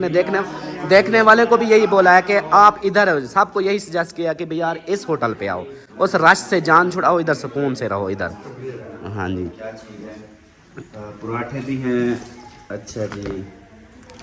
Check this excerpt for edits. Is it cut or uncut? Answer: uncut